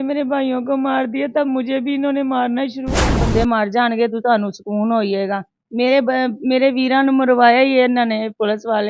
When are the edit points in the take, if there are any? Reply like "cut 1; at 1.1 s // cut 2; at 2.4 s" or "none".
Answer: cut 1; at 3.2 s